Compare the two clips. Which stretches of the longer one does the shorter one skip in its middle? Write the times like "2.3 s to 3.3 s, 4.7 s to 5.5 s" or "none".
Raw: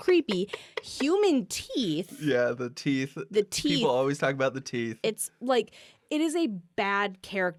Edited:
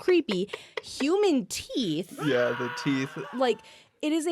3.2 s to 5.3 s